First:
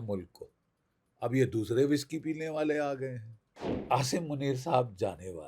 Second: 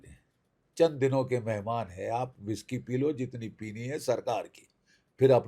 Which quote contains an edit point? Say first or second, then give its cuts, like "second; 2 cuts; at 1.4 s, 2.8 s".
first; 1 cut; at 3.8 s